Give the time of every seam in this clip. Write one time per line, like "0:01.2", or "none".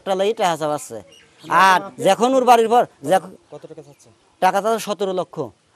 none